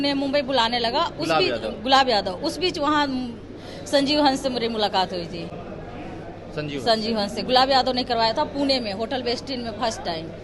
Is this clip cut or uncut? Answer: uncut